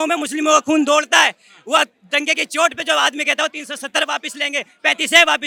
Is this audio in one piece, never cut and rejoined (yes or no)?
yes